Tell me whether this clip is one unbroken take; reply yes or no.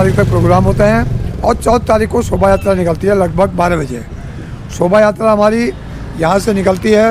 yes